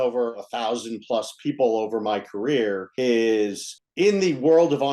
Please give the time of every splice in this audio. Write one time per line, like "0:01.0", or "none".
0:02.9